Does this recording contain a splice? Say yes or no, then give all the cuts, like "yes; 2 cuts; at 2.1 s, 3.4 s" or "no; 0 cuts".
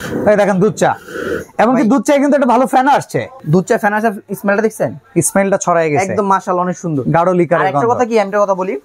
no; 0 cuts